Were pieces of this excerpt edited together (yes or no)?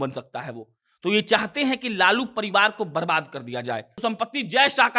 yes